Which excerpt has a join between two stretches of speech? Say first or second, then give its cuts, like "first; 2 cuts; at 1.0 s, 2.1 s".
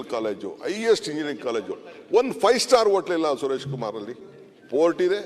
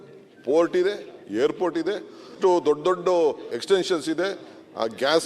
second; 2 cuts; at 2.2 s, 3.5 s